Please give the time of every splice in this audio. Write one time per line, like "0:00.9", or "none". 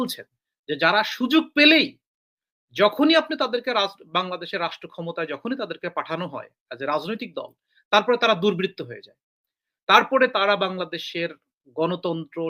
none